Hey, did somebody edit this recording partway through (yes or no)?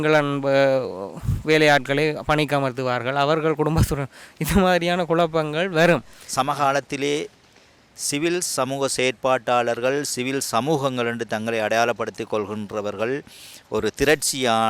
yes